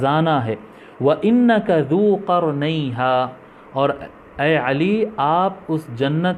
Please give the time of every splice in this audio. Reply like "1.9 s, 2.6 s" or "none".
none